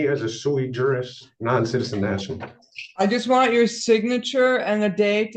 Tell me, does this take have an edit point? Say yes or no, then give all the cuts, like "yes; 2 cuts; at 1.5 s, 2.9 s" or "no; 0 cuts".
no; 0 cuts